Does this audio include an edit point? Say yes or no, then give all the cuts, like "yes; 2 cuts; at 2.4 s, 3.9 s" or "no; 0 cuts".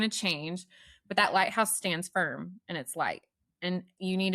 no; 0 cuts